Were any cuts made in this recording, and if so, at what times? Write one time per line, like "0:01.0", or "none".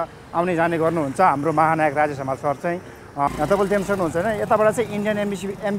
0:03.3